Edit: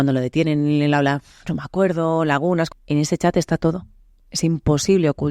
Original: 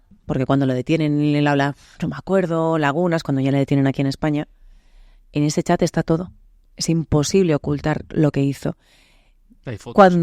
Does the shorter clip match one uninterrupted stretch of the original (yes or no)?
no